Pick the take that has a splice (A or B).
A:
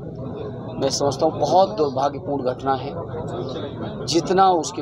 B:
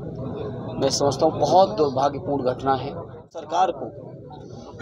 B